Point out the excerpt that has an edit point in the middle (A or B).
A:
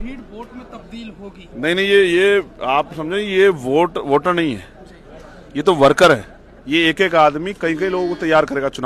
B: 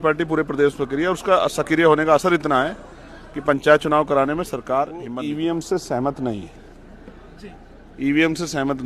B